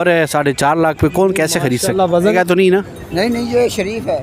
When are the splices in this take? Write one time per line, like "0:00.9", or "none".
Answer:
0:02.3